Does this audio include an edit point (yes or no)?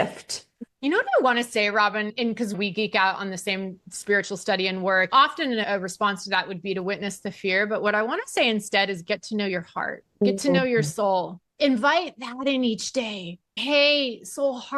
no